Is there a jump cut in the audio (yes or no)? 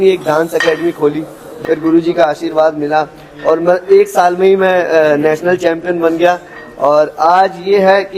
yes